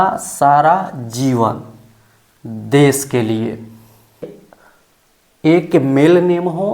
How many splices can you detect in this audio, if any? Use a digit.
1